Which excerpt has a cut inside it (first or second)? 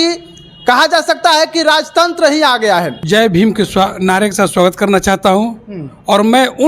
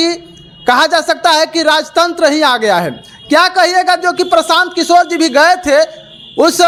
first